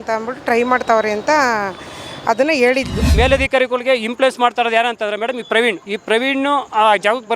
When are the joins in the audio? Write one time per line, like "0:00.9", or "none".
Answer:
0:03.1
0:05.9